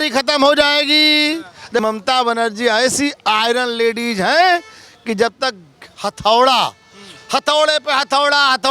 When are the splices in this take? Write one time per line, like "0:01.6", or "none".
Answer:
0:01.8